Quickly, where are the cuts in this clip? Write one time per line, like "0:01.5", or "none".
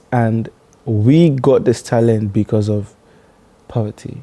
none